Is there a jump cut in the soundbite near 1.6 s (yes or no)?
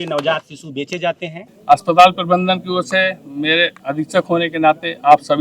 yes